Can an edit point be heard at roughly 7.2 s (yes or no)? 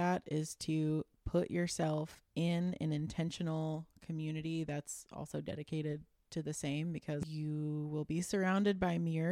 yes